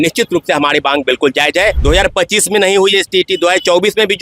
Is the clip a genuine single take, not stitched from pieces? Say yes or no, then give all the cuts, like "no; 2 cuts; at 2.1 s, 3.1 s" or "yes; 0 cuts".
no; 1 cut; at 1.8 s